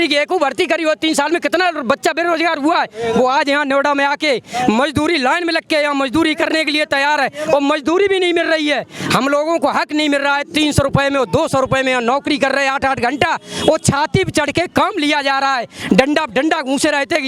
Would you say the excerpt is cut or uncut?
uncut